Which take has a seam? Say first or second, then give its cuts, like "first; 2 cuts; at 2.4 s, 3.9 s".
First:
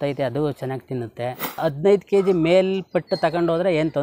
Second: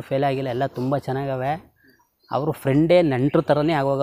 first; 1 cut; at 1.6 s